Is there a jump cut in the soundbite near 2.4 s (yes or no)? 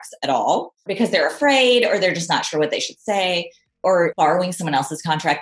no